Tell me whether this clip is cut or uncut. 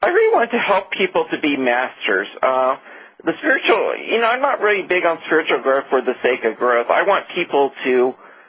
uncut